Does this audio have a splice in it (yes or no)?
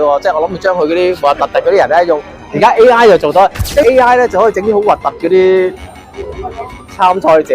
yes